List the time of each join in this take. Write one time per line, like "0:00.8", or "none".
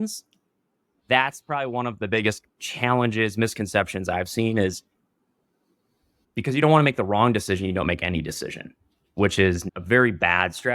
0:02.4
0:06.1
0:09.7